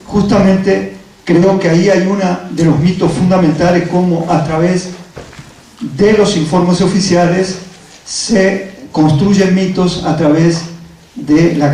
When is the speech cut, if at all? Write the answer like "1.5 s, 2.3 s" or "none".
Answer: none